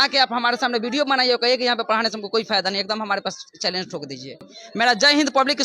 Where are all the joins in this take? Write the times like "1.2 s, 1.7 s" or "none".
4.4 s